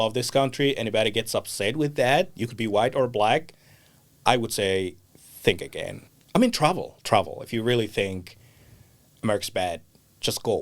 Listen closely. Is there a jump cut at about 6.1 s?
yes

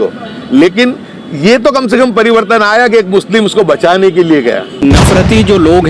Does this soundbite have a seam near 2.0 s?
no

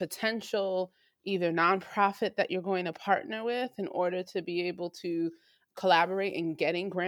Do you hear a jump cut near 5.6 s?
yes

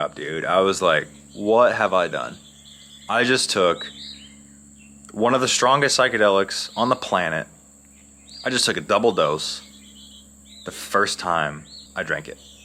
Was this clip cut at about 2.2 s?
no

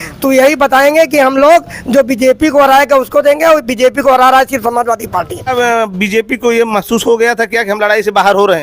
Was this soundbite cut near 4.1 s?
no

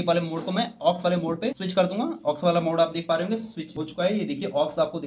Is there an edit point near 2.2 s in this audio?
no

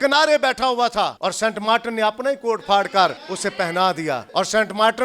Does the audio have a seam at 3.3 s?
yes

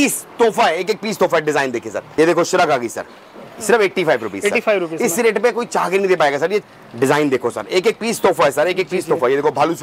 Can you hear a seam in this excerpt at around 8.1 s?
no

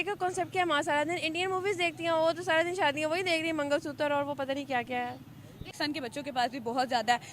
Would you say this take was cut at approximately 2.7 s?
no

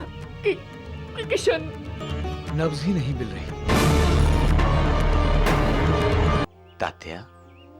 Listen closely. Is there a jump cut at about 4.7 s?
no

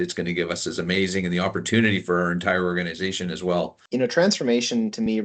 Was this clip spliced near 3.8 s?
yes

